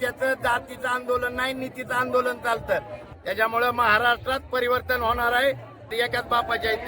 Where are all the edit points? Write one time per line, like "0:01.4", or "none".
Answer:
0:03.0
0:05.9